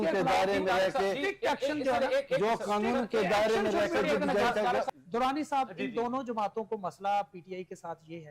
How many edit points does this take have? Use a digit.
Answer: 1